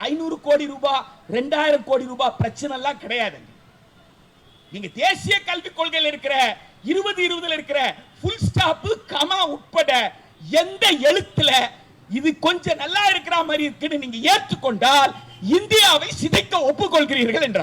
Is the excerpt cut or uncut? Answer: uncut